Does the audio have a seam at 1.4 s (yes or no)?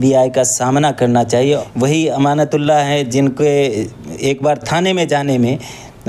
yes